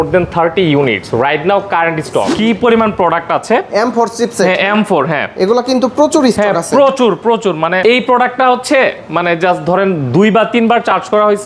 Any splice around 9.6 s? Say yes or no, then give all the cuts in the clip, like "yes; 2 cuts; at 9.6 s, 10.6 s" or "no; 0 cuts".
no; 2 cuts; at 2.3 s, 7.8 s